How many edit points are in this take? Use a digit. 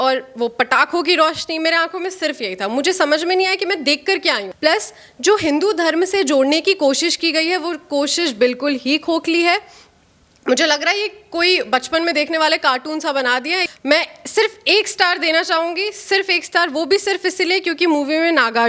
2